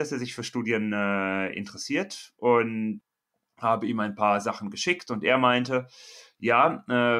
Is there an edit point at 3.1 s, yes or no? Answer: yes